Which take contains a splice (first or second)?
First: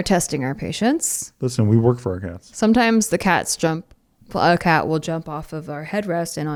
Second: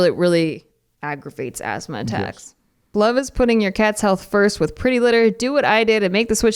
second